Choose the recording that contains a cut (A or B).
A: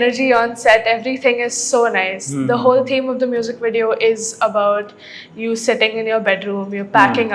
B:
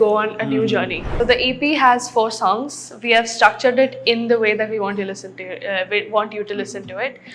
B